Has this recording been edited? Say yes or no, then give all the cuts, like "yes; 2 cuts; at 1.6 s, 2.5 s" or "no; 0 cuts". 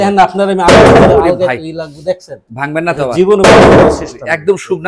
no; 0 cuts